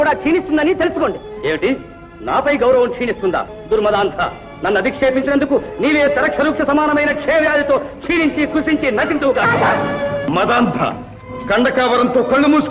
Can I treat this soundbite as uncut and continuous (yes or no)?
no